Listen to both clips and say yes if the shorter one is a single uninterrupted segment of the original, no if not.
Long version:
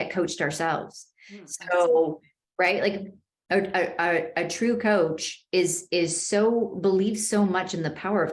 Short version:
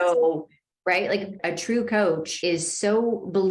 no